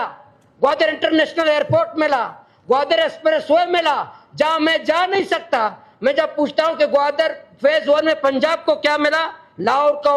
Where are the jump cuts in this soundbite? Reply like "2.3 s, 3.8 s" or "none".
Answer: none